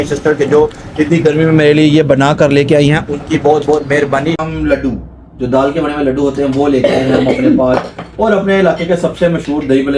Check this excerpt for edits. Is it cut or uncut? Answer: cut